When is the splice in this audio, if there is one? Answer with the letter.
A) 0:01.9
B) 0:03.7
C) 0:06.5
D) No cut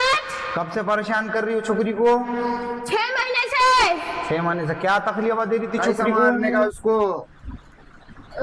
C